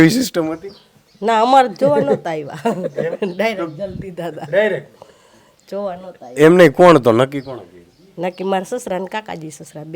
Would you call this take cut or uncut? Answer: uncut